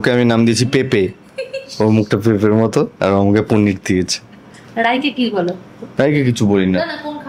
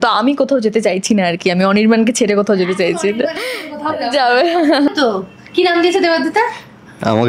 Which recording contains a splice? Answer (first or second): second